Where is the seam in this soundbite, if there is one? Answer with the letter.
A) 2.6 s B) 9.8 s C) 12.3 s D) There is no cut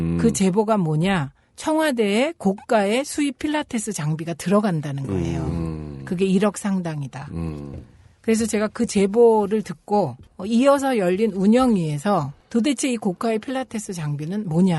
D